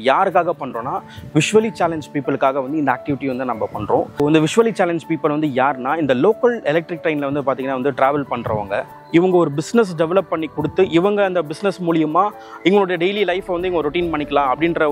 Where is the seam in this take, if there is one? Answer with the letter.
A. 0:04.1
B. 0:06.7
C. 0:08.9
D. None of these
C